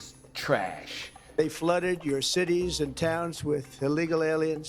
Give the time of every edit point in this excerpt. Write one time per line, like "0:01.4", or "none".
0:01.4